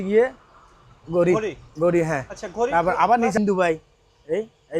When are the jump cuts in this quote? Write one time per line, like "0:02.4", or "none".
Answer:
0:03.4